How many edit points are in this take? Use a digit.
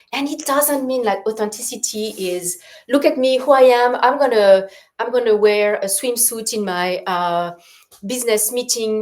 0